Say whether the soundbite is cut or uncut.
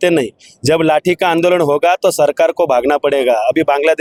uncut